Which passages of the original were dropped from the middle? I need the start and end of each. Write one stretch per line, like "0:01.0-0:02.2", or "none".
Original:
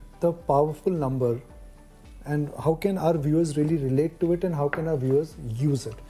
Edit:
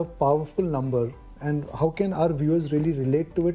0:01.6-0:02.1